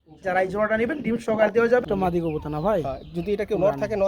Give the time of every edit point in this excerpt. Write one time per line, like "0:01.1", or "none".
0:01.9